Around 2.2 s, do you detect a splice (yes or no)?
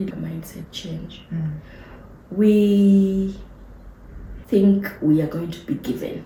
no